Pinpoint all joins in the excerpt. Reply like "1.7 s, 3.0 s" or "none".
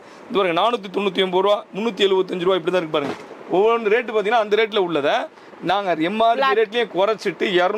none